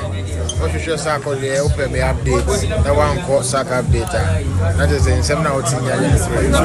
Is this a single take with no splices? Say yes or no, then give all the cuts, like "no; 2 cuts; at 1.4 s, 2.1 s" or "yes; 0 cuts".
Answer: yes; 0 cuts